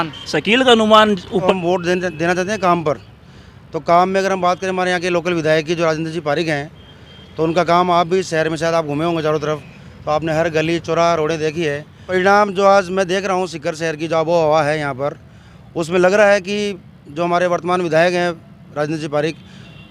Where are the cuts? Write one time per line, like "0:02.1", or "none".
0:01.5
0:12.1